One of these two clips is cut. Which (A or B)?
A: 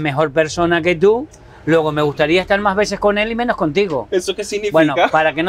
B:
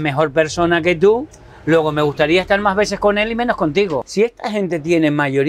B